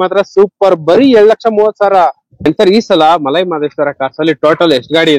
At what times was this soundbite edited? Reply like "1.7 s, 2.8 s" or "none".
2.3 s